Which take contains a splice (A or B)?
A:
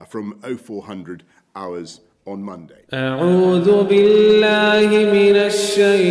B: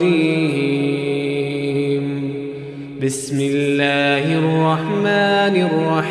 A